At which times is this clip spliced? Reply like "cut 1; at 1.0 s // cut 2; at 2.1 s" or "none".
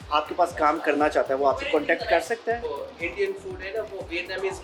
cut 1; at 2.7 s